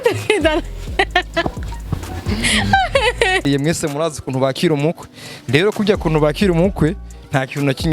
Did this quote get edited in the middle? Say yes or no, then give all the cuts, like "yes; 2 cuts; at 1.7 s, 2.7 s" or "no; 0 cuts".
yes; 1 cut; at 3.4 s